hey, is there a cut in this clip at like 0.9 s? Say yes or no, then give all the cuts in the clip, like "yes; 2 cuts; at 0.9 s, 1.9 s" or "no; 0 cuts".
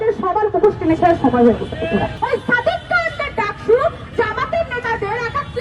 no; 2 cuts; at 2.1 s, 4.1 s